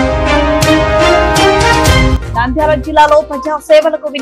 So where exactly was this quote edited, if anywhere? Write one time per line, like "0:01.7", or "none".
0:02.1